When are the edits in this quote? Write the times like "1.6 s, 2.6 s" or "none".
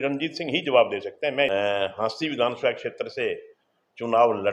1.5 s